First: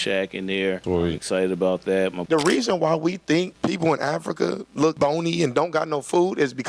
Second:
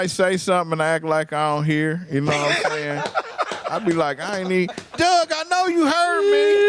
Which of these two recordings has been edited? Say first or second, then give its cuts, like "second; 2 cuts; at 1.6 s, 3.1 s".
first; 4 cuts; at 0.8 s, 2.2 s, 3.5 s, 4.9 s